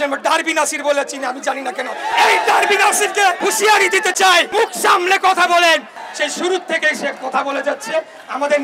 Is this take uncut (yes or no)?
no